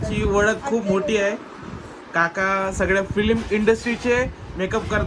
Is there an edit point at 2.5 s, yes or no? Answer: no